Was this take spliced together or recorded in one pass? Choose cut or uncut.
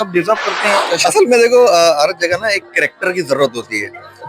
cut